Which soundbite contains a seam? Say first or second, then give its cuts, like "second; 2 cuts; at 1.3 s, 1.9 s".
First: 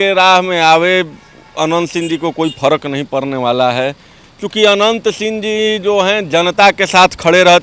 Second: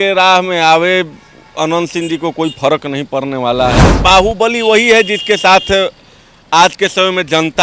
second; 1 cut; at 3.9 s